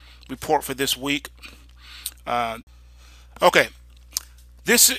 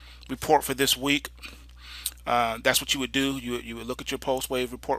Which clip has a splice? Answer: second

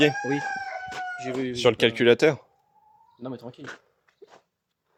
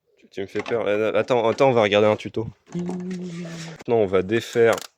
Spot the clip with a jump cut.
second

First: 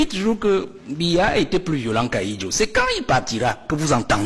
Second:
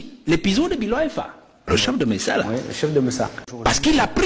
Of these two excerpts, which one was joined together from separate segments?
second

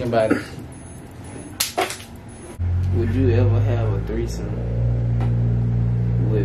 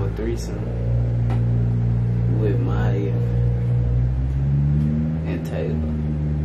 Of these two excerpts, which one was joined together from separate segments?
first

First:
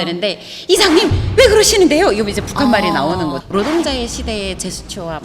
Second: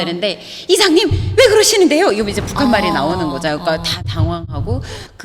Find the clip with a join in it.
first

